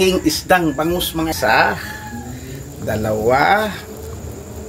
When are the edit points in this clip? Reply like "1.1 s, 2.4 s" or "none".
1.3 s